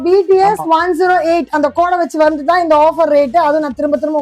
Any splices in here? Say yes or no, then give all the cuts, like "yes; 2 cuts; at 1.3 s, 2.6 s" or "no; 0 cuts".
no; 0 cuts